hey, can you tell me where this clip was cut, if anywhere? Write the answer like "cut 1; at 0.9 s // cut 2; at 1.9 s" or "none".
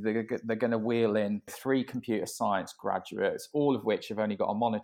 cut 1; at 1.6 s

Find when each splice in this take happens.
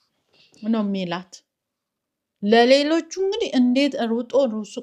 none

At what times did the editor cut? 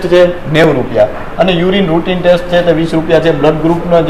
none

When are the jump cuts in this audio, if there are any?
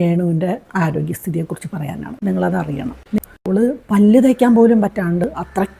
cut 1; at 3.2 s

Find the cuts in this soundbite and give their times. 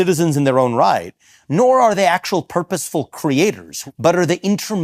cut 1; at 3.7 s

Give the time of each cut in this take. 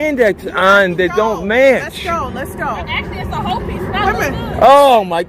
none

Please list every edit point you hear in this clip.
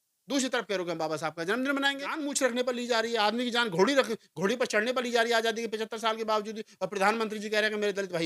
cut 1; at 2.3 s

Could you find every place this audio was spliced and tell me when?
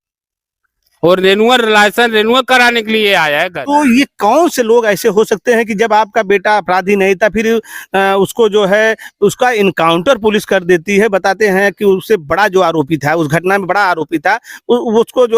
cut 1; at 3.6 s

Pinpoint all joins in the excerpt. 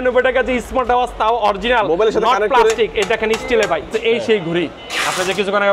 cut 1; at 3.9 s

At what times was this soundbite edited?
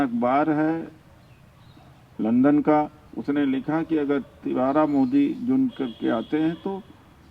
none

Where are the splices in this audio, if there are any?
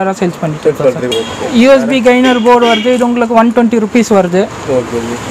cut 1; at 1.1 s

